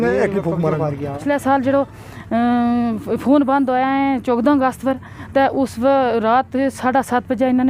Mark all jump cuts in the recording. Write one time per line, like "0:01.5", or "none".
0:01.2